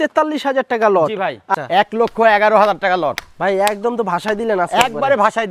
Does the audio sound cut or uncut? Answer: cut